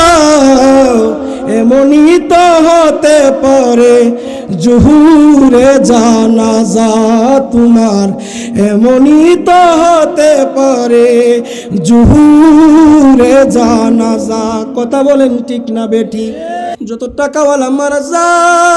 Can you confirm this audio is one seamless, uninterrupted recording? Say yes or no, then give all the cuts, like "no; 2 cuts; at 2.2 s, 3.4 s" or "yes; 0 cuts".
no; 1 cut; at 16.8 s